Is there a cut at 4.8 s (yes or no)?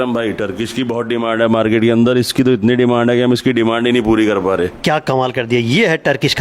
yes